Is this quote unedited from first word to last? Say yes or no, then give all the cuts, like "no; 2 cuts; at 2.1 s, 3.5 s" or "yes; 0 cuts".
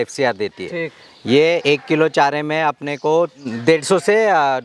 no; 1 cut; at 3.5 s